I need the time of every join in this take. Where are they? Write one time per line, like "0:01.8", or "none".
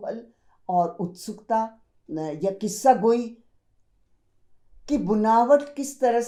none